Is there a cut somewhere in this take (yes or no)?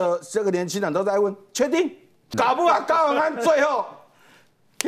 yes